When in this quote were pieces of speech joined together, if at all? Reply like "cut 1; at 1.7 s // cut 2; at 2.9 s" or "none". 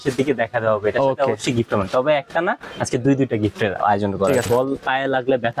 cut 1; at 4.4 s

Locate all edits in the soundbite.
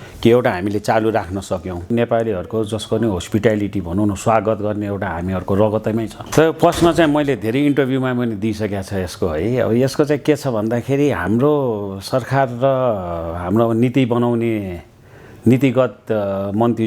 cut 1; at 1.9 s // cut 2; at 6.2 s

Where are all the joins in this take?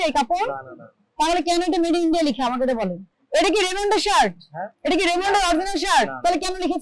cut 1; at 3.1 s

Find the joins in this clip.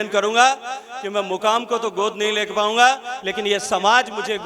none

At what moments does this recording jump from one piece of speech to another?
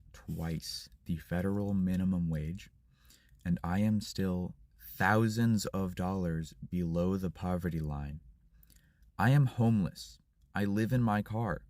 none

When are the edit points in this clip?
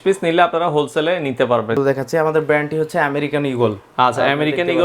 cut 1; at 1.8 s

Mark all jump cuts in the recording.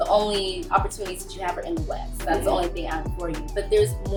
none

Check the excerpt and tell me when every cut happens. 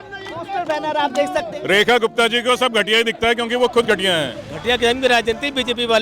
cut 1; at 1.5 s // cut 2; at 4.5 s

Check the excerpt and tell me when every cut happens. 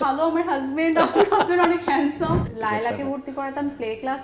cut 1; at 2.5 s

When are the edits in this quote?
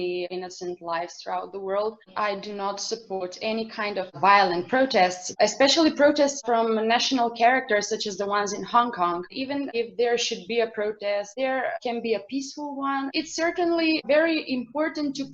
cut 1; at 2.0 s // cut 2; at 9.3 s // cut 3; at 13.1 s

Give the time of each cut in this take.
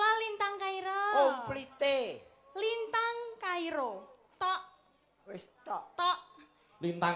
none

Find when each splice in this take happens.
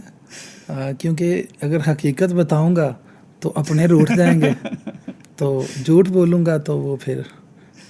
none

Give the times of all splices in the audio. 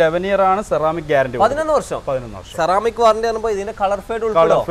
none

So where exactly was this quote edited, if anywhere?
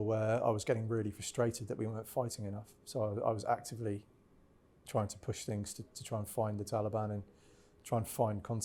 none

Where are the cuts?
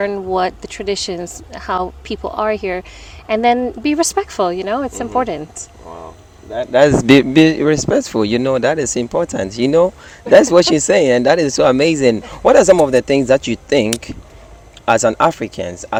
none

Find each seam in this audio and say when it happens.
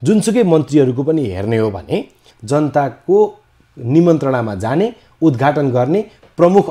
cut 1; at 2.3 s

